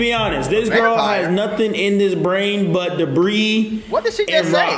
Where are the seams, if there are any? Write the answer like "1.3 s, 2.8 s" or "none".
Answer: none